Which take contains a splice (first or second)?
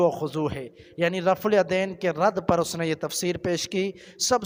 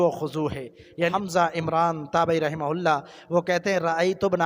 second